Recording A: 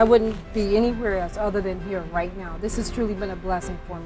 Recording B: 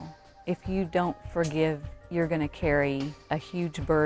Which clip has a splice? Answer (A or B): B